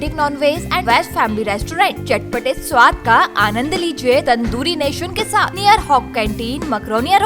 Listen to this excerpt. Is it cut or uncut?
cut